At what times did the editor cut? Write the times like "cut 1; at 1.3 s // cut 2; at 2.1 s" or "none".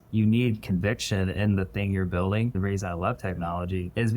cut 1; at 2.5 s